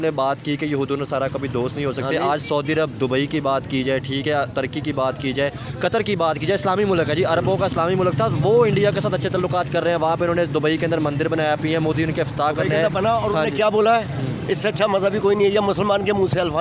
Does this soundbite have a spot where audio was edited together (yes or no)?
no